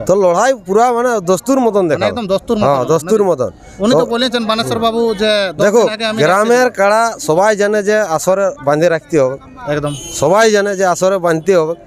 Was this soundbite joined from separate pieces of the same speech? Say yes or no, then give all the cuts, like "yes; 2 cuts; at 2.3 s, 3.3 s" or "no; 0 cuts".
no; 0 cuts